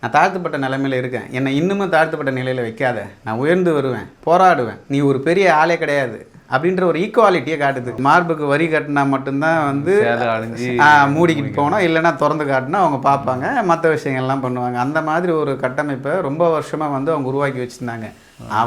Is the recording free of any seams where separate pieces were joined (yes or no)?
no